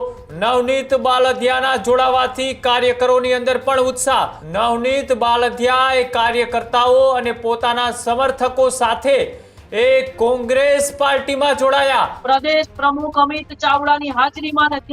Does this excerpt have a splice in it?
yes; 2 cuts; at 4.4 s, 12.2 s

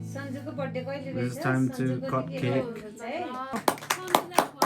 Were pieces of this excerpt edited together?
yes; 1 cut; at 3.6 s

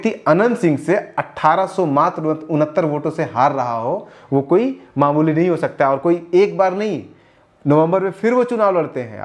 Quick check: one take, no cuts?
yes; 0 cuts

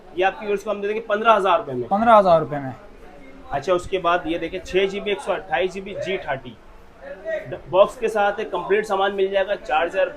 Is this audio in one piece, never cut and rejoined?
yes; 0 cuts

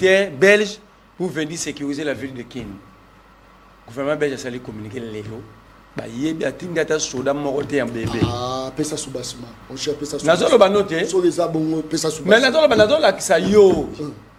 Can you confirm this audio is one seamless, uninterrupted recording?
yes; 0 cuts

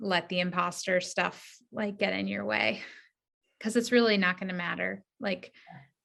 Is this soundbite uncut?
yes; 0 cuts

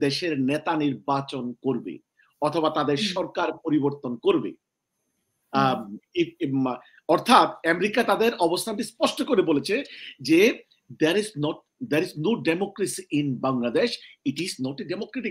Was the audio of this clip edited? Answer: no; 0 cuts

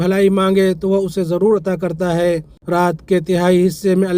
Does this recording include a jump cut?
yes; 1 cut; at 2.5 s

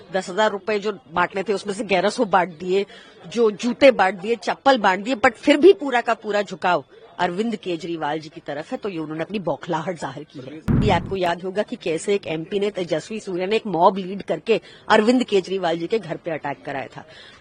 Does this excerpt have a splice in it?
yes; 1 cut; at 10.8 s

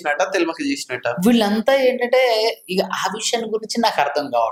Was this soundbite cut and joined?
no; 0 cuts

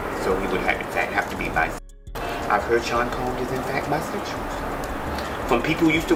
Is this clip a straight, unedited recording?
yes; 0 cuts

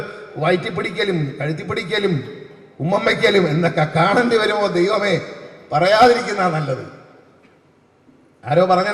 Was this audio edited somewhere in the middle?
no; 0 cuts

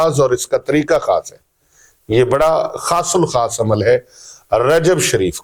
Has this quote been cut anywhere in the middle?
no; 0 cuts

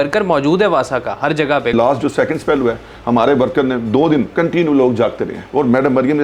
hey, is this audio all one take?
no; 3 cuts; at 1.7 s, 4.3 s, 5.4 s

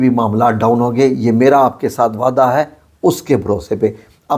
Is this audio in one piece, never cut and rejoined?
yes; 0 cuts

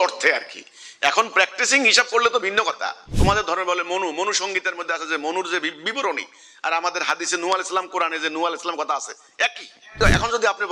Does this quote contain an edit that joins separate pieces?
yes; 2 cuts; at 3.1 s, 10.0 s

